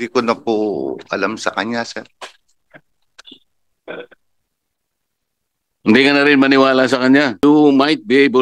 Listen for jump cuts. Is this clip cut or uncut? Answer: cut